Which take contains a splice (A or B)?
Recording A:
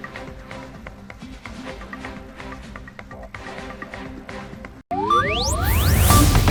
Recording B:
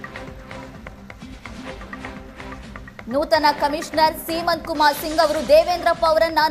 B